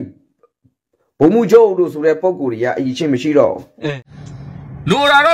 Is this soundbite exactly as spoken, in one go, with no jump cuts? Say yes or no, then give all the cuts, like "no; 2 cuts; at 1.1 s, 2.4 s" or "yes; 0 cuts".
no; 1 cut; at 4.0 s